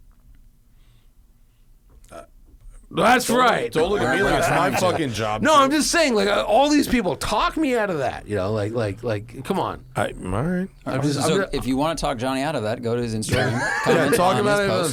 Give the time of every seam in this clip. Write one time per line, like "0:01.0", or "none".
none